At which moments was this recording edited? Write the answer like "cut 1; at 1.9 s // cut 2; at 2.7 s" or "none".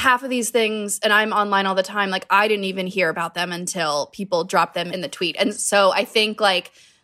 cut 1; at 4.9 s